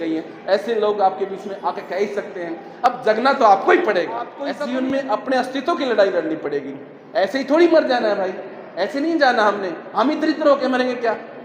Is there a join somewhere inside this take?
yes; 1 cut; at 4.4 s

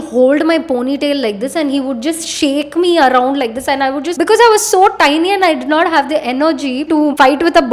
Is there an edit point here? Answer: no; 0 cuts

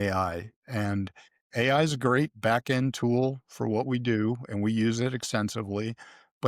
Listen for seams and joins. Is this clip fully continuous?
yes; 0 cuts

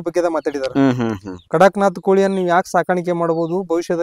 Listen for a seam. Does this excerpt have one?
no; 0 cuts

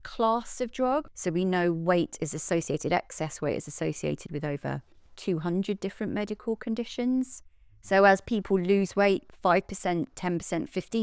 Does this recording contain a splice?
yes; 1 cut; at 1.2 s

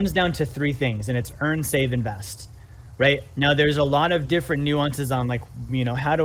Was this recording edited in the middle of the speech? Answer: no; 0 cuts

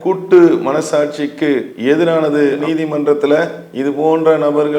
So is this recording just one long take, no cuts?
no; 1 cut; at 2.6 s

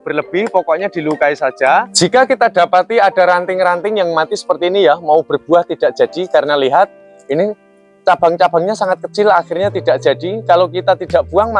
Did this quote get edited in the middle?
yes; 1 cut; at 1.7 s

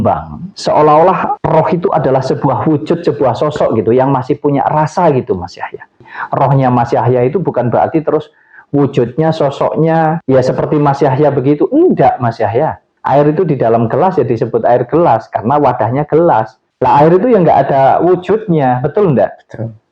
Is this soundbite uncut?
no; 2 cuts; at 6.2 s, 12.9 s

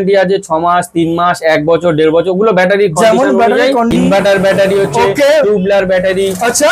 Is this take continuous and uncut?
no; 1 cut; at 3.9 s

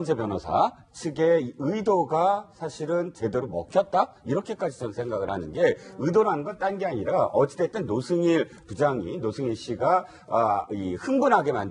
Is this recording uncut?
no; 1 cut; at 8.0 s

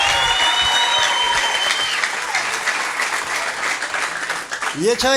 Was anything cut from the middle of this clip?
no; 0 cuts

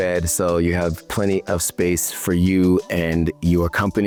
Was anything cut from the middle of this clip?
no; 0 cuts

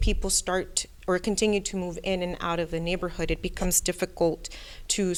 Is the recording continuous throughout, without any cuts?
yes; 0 cuts

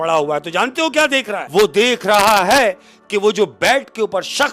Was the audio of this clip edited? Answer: yes; 1 cut; at 1.4 s

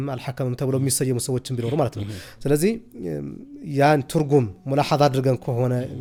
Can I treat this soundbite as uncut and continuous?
yes; 0 cuts

